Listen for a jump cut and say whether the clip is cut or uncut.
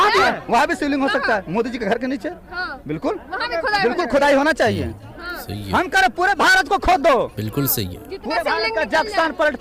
uncut